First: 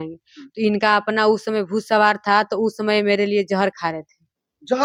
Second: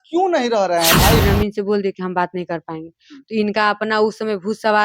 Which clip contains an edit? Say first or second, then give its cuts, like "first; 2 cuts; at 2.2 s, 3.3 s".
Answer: second; 1 cut; at 1.2 s